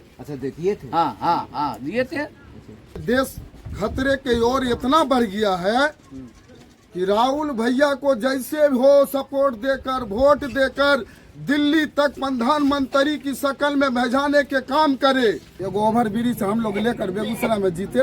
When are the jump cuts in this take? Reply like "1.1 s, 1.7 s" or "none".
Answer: 3.0 s, 15.5 s